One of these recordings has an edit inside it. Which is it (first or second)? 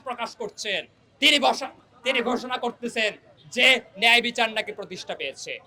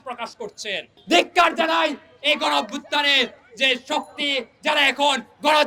second